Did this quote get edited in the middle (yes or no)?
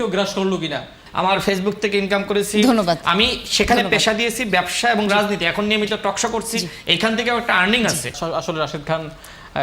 yes